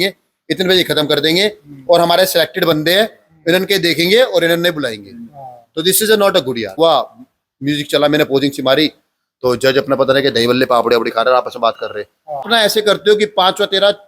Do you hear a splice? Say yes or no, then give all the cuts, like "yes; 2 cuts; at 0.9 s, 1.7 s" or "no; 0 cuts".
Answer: yes; 2 cuts; at 6.8 s, 12.5 s